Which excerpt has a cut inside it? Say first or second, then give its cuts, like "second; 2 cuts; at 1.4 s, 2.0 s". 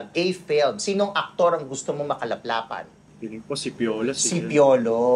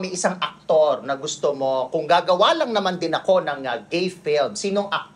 first; 1 cut; at 3.0 s